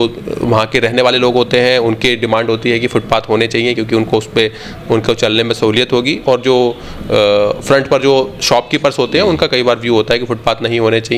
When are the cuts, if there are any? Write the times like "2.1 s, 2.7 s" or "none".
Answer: none